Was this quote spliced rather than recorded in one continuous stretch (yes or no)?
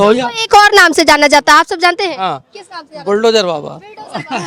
no